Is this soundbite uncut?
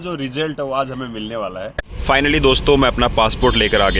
no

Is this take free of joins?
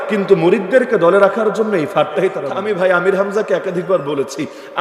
no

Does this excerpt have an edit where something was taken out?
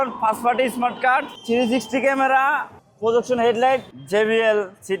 yes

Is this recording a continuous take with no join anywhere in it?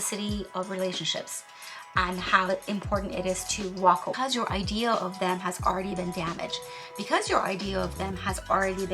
no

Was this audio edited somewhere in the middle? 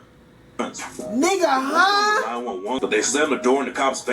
yes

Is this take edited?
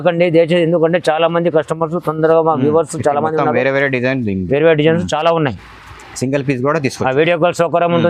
no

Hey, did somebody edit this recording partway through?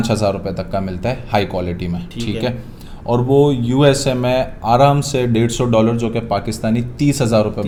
no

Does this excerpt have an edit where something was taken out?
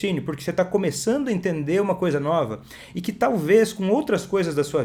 no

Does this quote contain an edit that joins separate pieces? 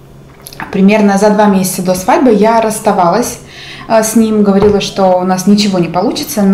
no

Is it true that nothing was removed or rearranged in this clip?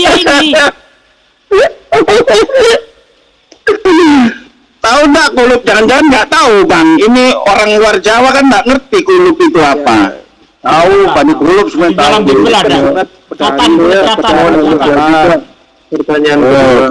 yes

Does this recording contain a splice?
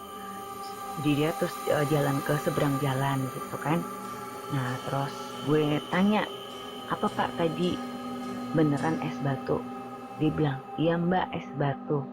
yes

